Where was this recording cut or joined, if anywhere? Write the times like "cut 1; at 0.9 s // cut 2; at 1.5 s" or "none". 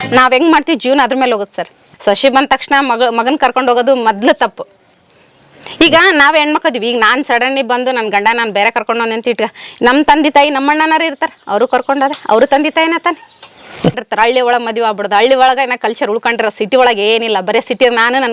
cut 1; at 1.8 s // cut 2; at 14.0 s